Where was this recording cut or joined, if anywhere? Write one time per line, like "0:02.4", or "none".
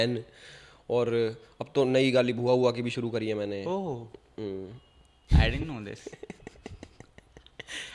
none